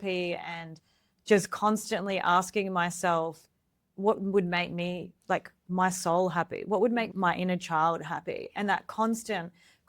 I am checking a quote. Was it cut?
yes; 2 cuts; at 3.8 s, 7.1 s

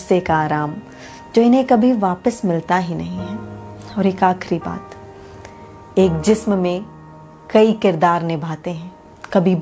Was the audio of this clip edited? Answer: no; 0 cuts

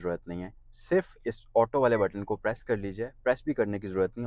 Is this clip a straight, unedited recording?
yes; 0 cuts

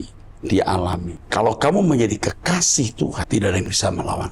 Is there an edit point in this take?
yes; 2 cuts; at 1.2 s, 3.2 s

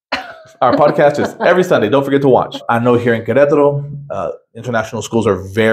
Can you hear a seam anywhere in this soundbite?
yes; 1 cut; at 2.6 s

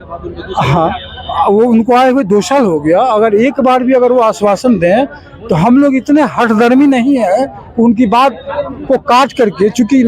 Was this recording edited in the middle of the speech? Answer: no; 0 cuts

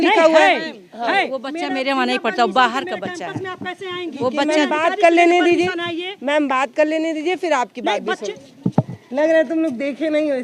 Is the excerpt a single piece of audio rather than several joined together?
no; 1 cut; at 8.2 s

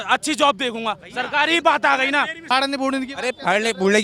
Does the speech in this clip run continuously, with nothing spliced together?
no; 1 cut; at 2.4 s

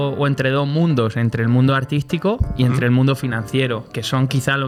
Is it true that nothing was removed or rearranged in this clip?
yes; 0 cuts

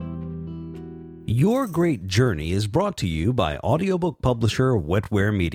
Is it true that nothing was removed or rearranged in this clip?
no; 1 cut; at 1.2 s

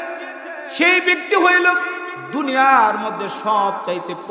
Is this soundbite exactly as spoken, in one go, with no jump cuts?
yes; 0 cuts

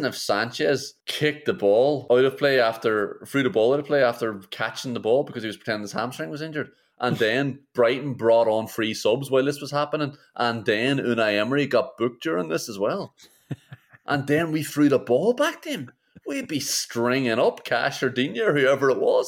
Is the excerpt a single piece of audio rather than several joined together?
no; 2 cuts; at 1.0 s, 2.0 s

